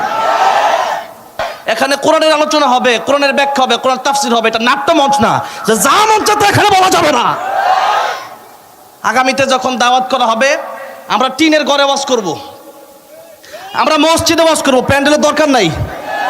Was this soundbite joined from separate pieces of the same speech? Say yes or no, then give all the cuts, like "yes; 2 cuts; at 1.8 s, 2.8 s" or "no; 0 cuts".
yes; 1 cut; at 1.5 s